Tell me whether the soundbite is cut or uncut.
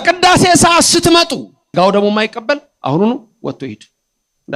cut